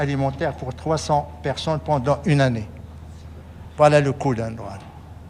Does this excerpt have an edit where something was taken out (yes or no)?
no